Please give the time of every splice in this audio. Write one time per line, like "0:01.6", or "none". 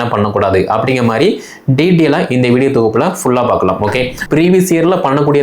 0:04.2